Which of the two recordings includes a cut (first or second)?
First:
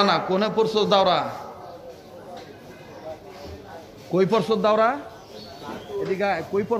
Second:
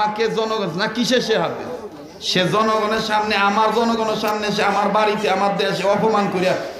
first